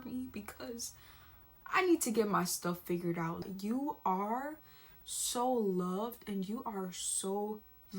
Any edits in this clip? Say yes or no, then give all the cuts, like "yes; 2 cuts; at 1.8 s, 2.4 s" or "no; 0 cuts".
yes; 1 cut; at 3.4 s